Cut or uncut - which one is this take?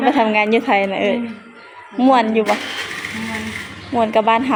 uncut